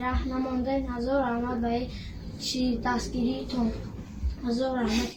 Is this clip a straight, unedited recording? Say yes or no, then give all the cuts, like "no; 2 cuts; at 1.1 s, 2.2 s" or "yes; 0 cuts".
yes; 0 cuts